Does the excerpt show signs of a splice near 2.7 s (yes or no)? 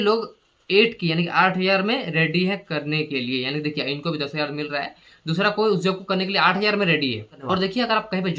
no